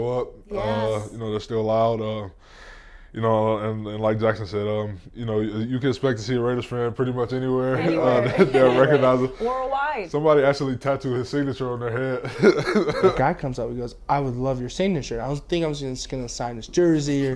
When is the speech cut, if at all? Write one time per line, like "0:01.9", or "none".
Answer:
0:13.1